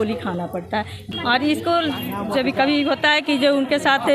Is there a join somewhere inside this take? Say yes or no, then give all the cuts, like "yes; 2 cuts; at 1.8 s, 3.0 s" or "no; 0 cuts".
yes; 1 cut; at 1.0 s